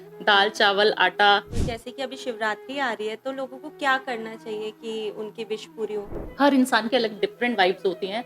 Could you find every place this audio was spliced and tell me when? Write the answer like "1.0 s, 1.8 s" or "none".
1.6 s, 6.2 s